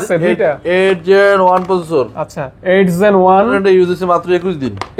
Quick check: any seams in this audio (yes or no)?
yes